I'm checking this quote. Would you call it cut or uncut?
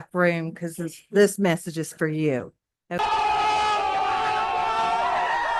uncut